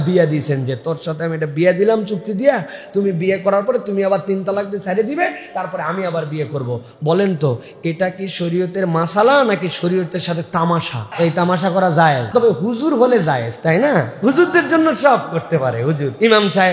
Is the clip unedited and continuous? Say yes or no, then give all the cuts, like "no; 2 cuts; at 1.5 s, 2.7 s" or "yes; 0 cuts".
no; 2 cuts; at 11.0 s, 12.2 s